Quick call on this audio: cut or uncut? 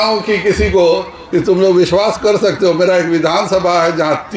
uncut